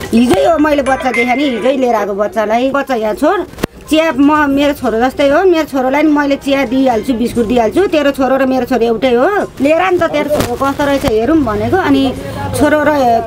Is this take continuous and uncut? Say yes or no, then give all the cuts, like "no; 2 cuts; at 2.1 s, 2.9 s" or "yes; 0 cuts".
no; 2 cuts; at 2.8 s, 9.5 s